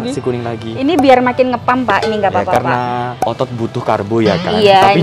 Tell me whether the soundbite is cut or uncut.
uncut